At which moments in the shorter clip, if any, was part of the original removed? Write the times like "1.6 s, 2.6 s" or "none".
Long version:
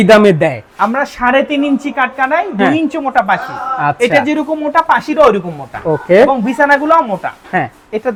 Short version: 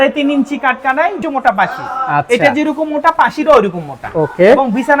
1.2 s